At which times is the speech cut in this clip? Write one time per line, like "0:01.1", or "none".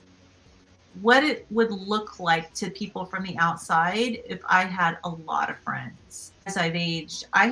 0:06.5